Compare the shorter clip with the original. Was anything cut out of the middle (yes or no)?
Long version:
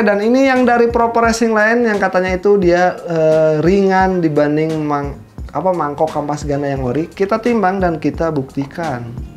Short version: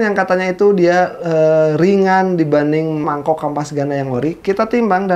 yes